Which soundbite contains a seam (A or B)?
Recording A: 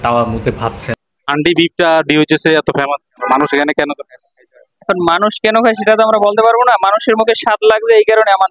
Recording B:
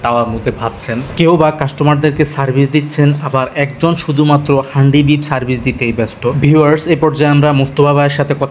A